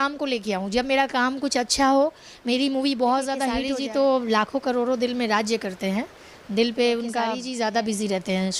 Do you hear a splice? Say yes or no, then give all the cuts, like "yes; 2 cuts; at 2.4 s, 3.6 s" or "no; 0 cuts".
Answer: yes; 2 cuts; at 3.6 s, 7.4 s